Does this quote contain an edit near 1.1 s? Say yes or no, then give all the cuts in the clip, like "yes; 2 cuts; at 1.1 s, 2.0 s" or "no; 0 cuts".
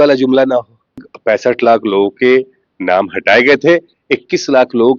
yes; 1 cut; at 1.1 s